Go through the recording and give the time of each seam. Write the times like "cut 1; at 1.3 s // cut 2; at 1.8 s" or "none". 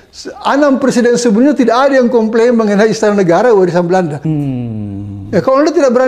cut 1; at 4.2 s